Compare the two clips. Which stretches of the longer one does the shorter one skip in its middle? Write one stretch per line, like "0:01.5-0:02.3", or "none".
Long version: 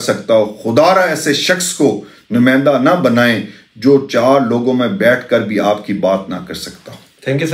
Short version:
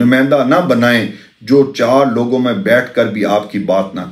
none